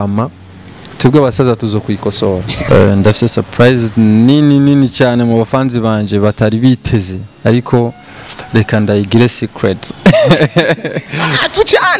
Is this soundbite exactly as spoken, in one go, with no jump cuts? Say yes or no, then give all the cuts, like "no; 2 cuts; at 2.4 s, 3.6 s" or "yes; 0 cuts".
no; 1 cut; at 2.6 s